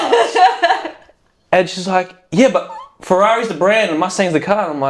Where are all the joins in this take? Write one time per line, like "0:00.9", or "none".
none